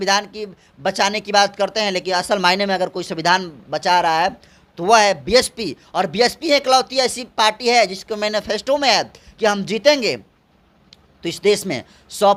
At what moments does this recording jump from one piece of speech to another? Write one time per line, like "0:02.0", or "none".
none